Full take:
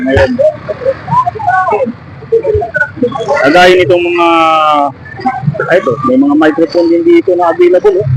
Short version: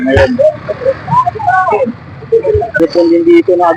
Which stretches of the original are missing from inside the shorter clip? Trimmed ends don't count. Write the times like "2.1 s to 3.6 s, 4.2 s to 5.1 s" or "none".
2.8 s to 6.6 s

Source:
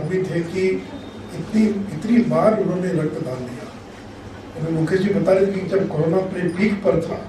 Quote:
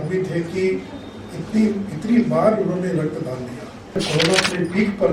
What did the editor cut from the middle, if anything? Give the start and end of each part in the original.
4.0 s to 5.8 s

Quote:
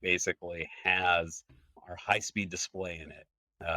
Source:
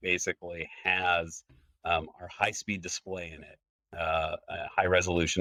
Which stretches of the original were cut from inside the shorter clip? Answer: 1.8 s to 2.1 s

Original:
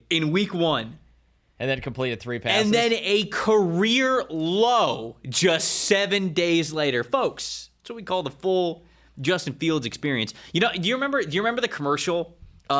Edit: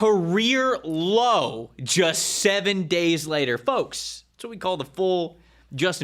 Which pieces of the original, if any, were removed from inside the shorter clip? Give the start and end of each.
none

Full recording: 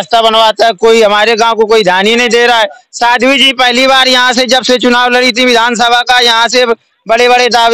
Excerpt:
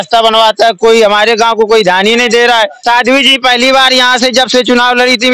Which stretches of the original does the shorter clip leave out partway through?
2.8 s to 2.9 s

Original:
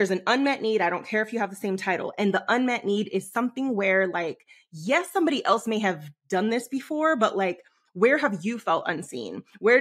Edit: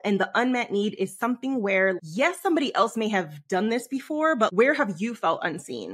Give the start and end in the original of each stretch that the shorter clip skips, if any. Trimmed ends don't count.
4.1 s to 4.7 s, 6.1 s to 6.2 s, 7.3 s to 8.0 s

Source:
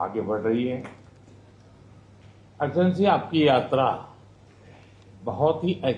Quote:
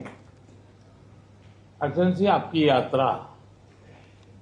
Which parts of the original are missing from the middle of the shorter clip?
none

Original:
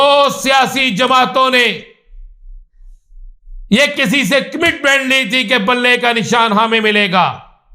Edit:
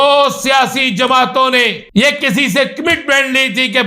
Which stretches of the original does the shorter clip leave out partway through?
1.8 s to 3.6 s

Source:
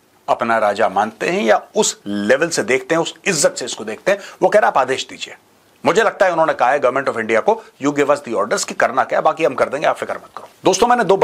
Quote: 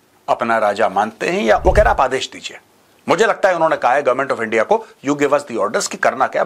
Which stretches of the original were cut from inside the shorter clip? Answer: 1.6 s to 4.4 s

